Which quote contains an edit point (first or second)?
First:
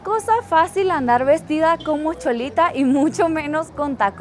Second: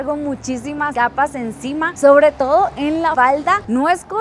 second